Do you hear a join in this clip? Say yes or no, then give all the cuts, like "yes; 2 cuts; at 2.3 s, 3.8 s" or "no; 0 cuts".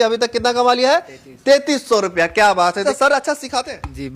yes; 1 cut; at 2.8 s